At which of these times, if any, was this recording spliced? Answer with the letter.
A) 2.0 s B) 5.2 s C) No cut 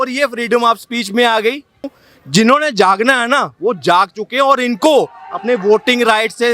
A